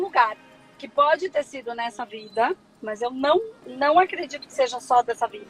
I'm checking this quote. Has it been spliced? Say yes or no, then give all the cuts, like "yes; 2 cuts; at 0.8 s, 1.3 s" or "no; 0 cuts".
no; 0 cuts